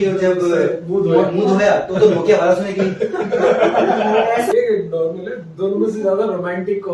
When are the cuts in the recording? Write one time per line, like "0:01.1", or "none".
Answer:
0:04.5